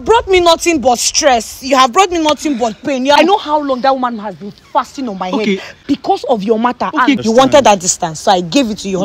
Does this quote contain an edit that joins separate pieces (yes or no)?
yes